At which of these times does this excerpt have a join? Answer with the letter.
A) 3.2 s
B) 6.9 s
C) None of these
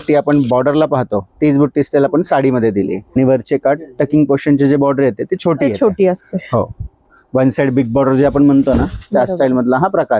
A